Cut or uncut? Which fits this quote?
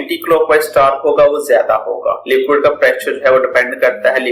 cut